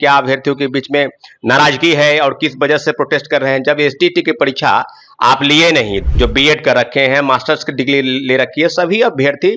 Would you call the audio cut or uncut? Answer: cut